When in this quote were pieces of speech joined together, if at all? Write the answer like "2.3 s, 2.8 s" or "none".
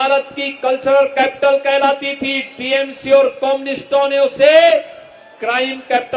none